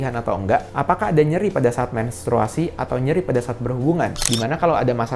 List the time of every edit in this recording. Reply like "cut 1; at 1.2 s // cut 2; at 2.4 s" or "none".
cut 1; at 4.2 s